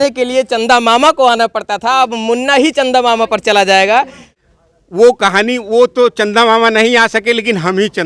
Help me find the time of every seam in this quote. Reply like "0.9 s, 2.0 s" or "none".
4.4 s